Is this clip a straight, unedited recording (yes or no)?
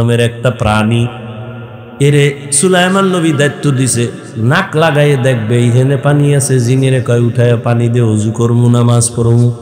no